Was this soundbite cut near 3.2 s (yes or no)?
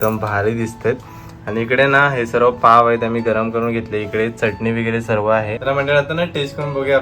no